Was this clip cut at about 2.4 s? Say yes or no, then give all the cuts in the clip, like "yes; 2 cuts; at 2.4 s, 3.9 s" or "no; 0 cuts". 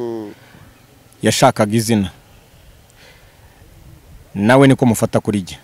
no; 0 cuts